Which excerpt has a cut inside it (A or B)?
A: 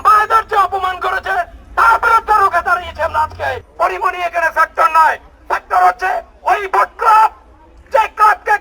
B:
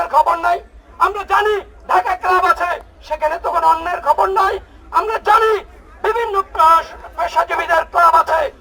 A